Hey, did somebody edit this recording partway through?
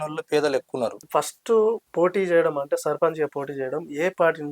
yes; 1 cut; at 1.0 s

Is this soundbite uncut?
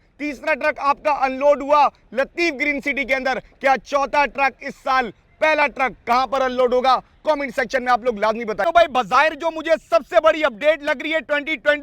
yes; 0 cuts

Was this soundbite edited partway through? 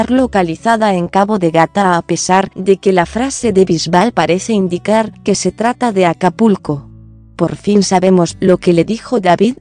yes; 1 cut; at 6.0 s

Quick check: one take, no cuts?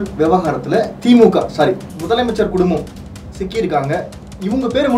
no; 1 cut; at 1.9 s

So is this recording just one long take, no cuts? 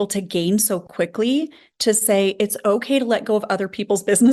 yes; 0 cuts

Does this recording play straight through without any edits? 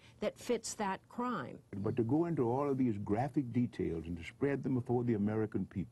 no; 1 cut; at 1.8 s

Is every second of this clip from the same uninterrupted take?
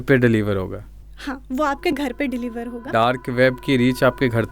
no; 1 cut; at 2.8 s

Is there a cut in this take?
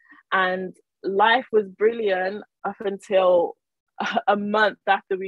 no; 0 cuts

